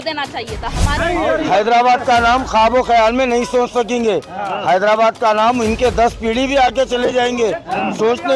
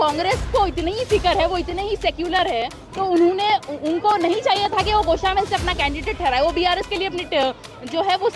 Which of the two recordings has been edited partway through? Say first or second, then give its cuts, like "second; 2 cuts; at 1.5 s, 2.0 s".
first; 1 cut; at 1.0 s